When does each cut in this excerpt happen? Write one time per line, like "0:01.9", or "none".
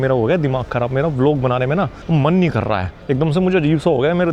0:02.0
0:02.9